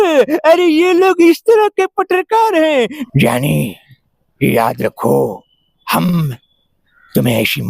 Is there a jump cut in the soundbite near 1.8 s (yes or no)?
no